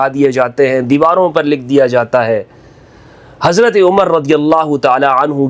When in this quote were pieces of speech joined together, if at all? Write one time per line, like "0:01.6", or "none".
none